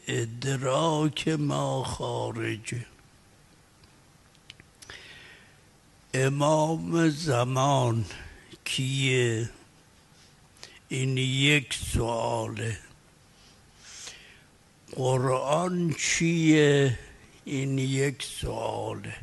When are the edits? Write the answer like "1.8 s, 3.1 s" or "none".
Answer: 1.5 s